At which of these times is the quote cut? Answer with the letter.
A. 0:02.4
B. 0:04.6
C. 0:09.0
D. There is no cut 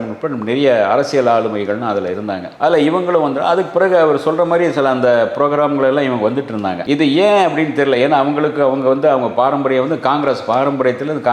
D